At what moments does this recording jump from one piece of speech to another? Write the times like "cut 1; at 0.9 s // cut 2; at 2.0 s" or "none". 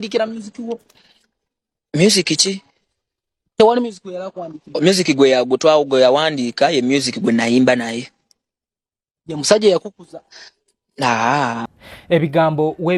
none